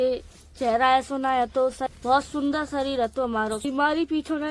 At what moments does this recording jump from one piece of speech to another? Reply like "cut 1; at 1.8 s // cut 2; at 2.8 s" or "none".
cut 1; at 1.8 s // cut 2; at 3.6 s